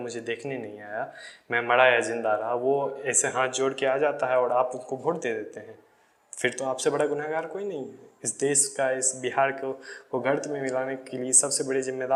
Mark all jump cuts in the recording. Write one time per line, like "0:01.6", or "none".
none